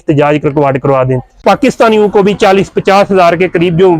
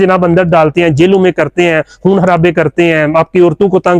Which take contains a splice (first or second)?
first